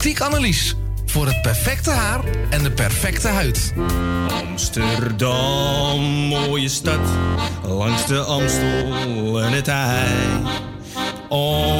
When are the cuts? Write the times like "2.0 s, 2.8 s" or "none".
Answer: 3.7 s